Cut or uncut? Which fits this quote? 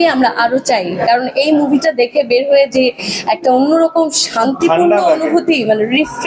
uncut